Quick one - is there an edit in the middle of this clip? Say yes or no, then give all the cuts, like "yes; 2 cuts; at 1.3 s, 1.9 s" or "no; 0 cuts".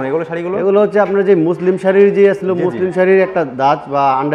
no; 0 cuts